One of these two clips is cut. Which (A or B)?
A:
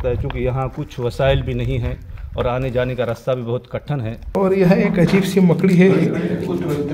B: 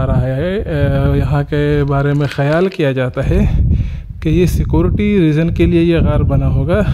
A